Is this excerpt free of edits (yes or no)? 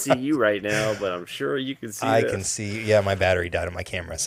yes